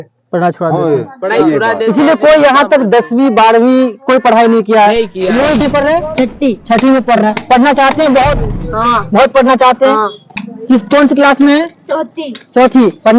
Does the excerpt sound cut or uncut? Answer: cut